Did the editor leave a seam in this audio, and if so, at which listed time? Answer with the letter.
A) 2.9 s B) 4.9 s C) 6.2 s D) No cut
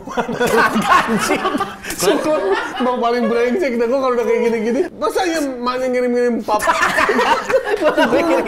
B